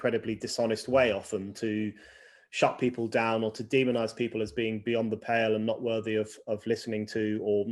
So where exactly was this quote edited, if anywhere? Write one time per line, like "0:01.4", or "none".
none

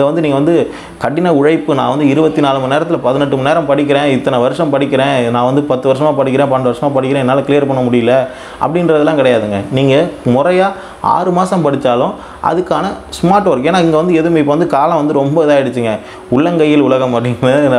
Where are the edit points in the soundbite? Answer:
none

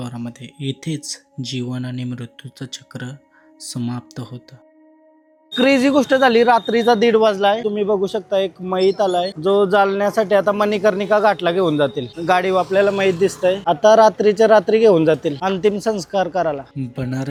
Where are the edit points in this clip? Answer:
none

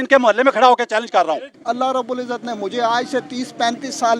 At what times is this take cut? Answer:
0:01.6

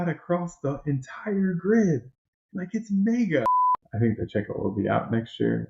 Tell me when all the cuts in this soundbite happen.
0:03.5

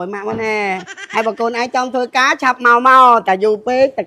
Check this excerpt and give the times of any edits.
0:00.9

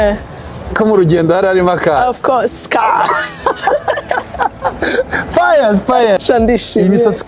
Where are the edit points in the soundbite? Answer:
0:06.2

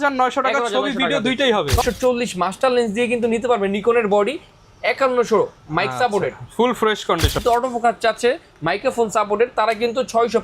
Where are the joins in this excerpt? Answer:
0:01.8
0:07.4

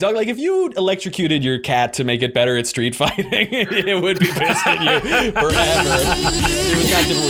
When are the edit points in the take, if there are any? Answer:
none

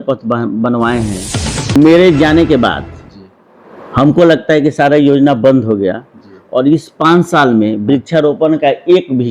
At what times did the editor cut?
0:01.8

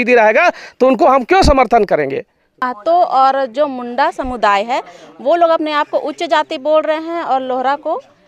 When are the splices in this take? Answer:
0:02.6

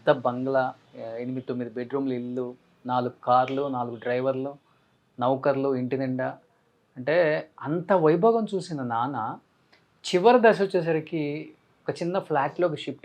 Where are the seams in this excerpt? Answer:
0:00.9

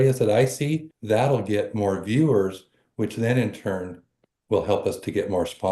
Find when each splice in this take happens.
0:00.9

